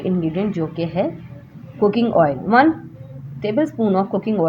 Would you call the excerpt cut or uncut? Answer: uncut